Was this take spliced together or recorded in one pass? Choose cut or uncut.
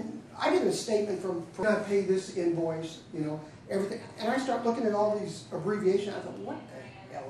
cut